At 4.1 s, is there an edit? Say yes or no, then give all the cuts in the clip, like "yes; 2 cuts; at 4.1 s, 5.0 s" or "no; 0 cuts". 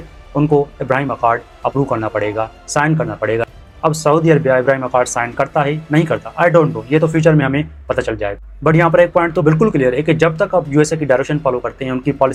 no; 0 cuts